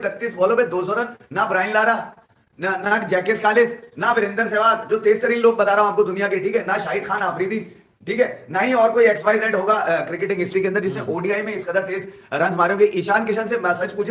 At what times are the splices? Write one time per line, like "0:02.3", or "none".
none